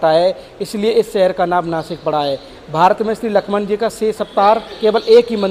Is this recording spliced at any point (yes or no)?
no